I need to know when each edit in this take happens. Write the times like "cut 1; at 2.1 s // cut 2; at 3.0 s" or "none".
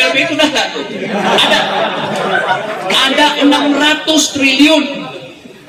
none